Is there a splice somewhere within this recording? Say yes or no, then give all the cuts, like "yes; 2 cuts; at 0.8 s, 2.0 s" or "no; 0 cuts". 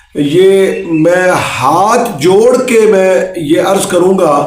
no; 0 cuts